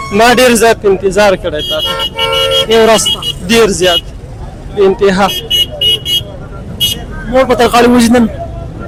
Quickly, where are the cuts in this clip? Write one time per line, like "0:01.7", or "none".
none